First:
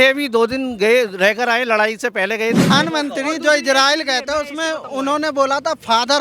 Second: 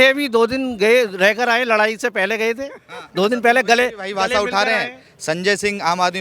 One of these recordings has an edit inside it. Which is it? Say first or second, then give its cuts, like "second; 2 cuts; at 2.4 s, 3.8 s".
first; 1 cut; at 2.7 s